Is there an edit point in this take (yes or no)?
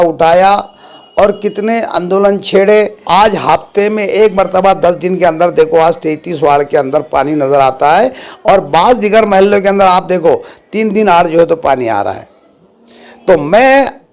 yes